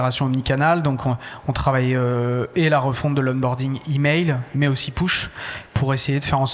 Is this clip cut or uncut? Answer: uncut